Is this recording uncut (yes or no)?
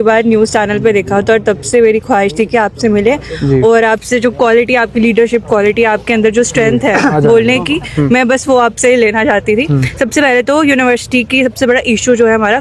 yes